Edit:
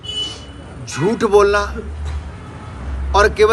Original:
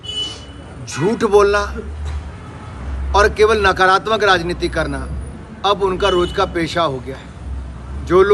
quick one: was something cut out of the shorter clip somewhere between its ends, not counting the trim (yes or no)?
no